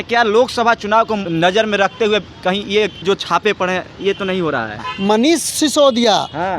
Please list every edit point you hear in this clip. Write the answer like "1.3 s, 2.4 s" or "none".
1.3 s, 3.0 s, 4.9 s